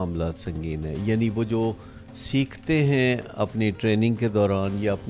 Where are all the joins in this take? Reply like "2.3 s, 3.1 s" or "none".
none